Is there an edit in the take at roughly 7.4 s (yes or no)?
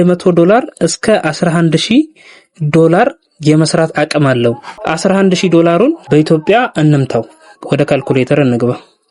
no